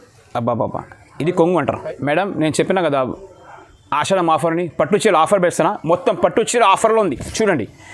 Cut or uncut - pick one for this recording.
uncut